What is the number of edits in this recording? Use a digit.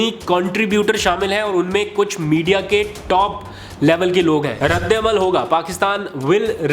1